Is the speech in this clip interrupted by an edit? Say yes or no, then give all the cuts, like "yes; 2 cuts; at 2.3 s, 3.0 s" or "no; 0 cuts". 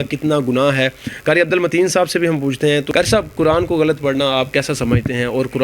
no; 0 cuts